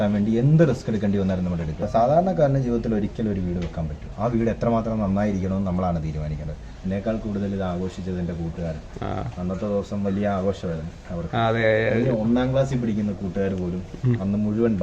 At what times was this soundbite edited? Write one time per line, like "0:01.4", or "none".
0:01.8
0:06.6